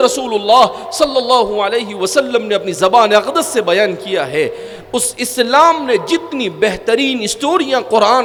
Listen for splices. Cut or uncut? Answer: uncut